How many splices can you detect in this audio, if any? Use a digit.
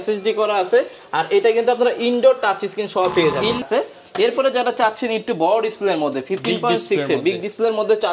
1